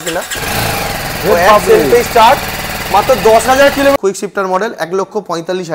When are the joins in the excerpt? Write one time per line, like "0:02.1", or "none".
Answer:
0:03.9